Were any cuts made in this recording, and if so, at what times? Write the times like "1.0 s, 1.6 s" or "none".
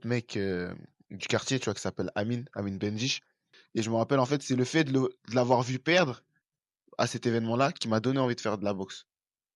none